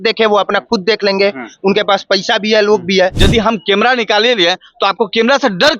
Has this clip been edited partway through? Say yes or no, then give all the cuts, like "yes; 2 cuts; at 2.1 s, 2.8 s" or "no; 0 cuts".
yes; 1 cut; at 3.2 s